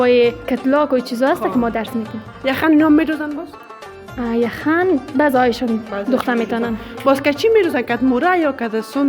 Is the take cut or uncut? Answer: uncut